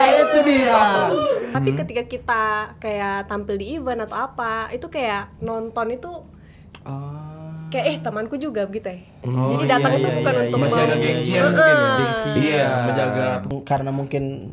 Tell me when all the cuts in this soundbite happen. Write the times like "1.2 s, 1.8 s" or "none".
1.5 s, 13.5 s